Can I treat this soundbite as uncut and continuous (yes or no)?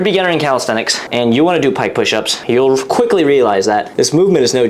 no